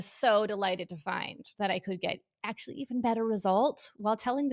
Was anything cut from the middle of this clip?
no; 0 cuts

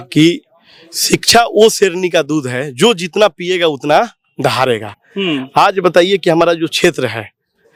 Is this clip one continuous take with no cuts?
yes; 0 cuts

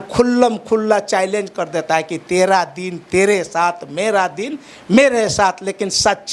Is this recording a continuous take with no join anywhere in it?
yes; 0 cuts

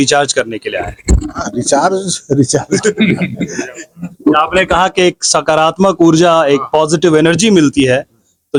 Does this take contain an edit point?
no; 0 cuts

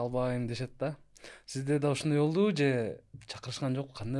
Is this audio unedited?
yes; 0 cuts

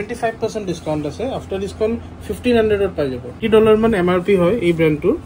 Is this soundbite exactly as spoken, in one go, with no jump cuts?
no; 1 cut; at 3.4 s

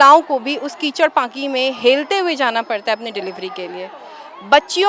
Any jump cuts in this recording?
no; 0 cuts

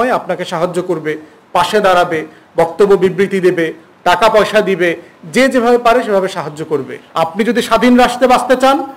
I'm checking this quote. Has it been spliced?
yes; 1 cut; at 7.0 s

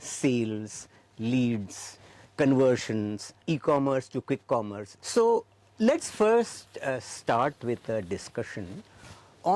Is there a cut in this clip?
no; 0 cuts

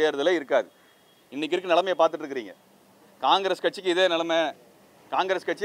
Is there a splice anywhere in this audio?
no; 0 cuts

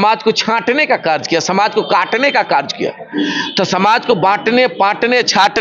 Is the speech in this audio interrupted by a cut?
no; 0 cuts

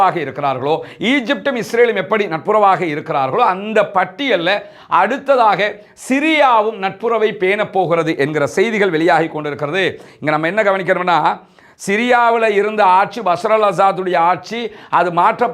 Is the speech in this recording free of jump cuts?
yes; 0 cuts

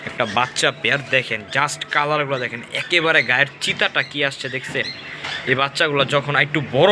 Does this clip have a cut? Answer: no; 0 cuts

